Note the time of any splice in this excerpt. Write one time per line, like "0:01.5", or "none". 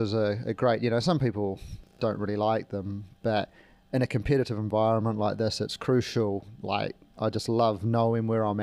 none